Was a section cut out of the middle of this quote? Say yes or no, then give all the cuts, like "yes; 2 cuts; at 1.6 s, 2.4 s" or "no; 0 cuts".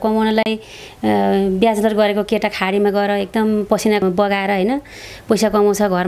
yes; 1 cut; at 4.0 s